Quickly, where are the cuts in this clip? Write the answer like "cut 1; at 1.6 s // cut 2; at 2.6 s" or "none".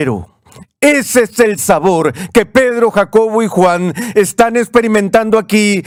none

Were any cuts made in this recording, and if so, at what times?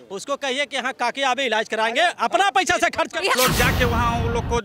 cut 1; at 3.4 s

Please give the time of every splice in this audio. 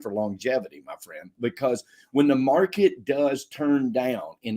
cut 1; at 1.2 s

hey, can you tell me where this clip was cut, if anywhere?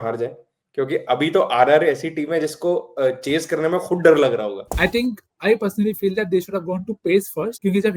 cut 1; at 4.7 s

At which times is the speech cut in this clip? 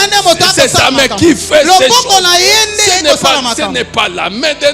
none

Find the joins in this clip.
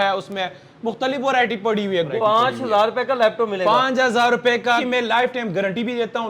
cut 1; at 2.1 s // cut 2; at 4.8 s

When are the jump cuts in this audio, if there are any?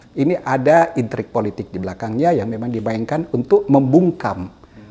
none

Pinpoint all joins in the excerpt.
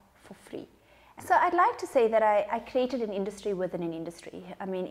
cut 1; at 1.2 s

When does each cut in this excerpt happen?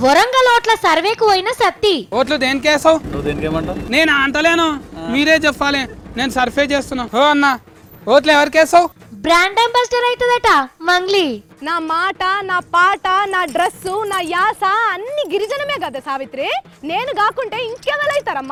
none

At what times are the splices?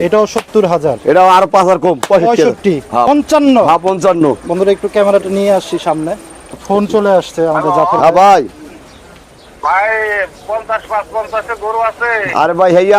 cut 1; at 3.1 s // cut 2; at 6.5 s

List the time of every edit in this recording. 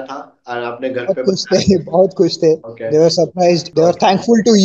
cut 1; at 2.7 s // cut 2; at 3.7 s

